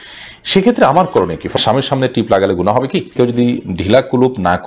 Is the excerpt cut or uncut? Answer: cut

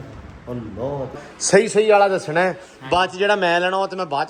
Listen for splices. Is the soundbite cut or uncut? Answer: cut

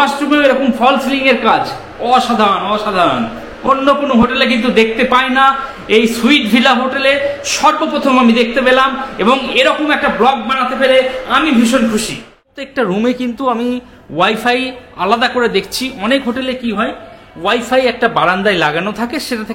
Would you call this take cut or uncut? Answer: cut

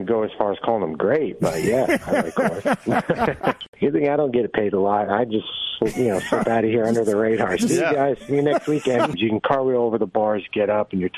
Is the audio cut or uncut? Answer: uncut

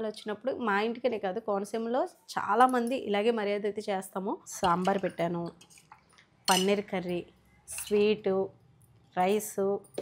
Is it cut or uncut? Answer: cut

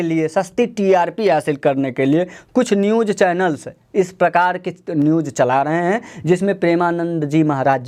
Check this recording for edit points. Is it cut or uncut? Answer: uncut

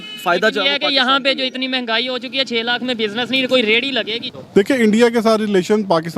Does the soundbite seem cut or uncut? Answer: cut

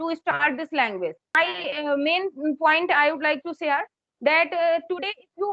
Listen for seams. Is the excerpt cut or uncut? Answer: cut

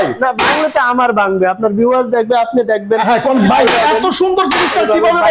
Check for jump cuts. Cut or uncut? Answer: cut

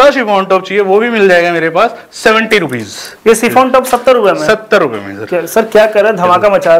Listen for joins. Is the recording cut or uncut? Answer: uncut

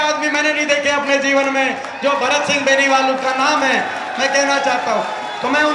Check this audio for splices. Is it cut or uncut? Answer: uncut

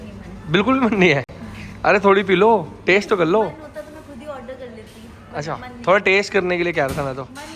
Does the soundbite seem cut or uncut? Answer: uncut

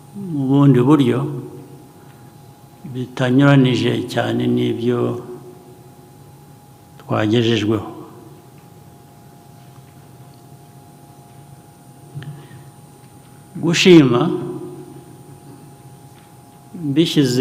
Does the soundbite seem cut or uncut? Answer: uncut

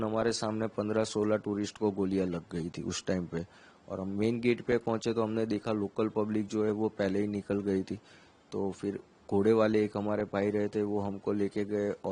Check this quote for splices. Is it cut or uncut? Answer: uncut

